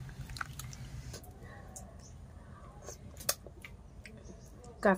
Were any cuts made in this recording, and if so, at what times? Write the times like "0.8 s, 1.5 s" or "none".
1.1 s